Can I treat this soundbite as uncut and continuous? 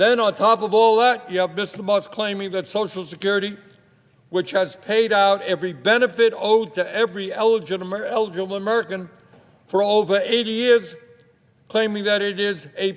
yes; 0 cuts

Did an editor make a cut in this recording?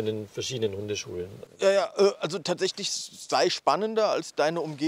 no; 0 cuts

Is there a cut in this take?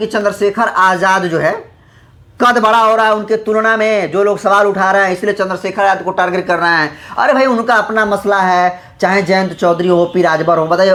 no; 0 cuts

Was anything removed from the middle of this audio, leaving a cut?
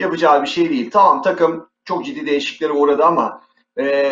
no; 0 cuts

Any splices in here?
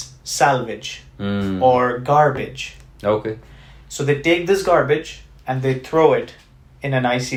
no; 0 cuts

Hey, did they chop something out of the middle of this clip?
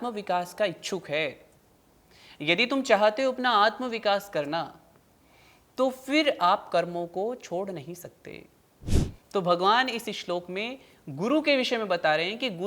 yes; 1 cut; at 9.1 s

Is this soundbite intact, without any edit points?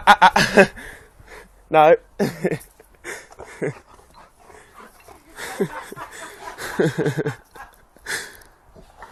yes; 0 cuts

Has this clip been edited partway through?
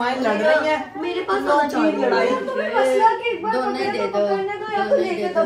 no; 0 cuts

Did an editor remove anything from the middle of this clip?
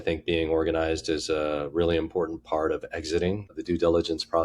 yes; 1 cut; at 3.5 s

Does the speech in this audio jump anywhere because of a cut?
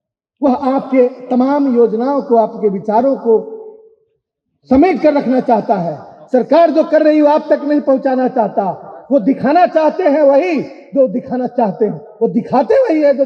no; 0 cuts

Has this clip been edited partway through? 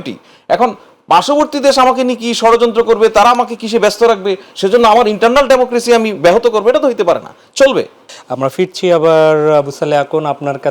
no; 0 cuts

